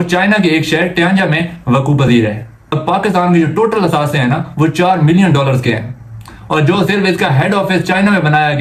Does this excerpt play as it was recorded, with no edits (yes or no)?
yes